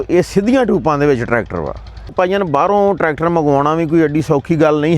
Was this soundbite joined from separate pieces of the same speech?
yes; 1 cut; at 2.1 s

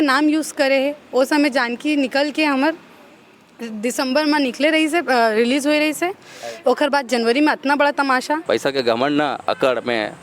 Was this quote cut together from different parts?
yes; 1 cut; at 8.4 s

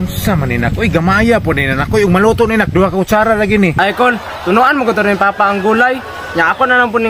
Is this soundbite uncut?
no; 1 cut; at 3.7 s

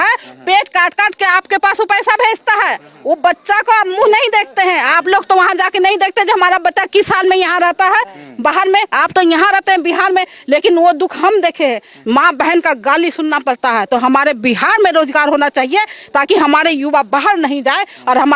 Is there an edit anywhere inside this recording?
no; 0 cuts

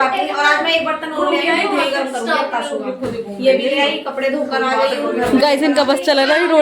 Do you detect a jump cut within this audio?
no; 0 cuts

